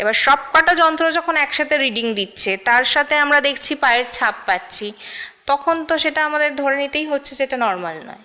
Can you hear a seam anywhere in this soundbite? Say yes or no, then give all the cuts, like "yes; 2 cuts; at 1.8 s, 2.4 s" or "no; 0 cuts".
no; 0 cuts